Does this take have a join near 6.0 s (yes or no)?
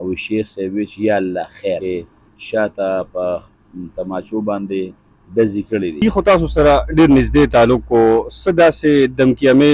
yes